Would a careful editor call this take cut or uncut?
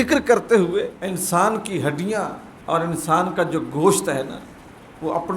cut